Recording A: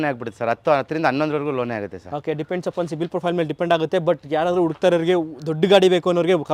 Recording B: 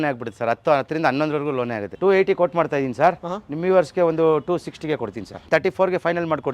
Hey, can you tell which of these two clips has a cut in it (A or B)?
B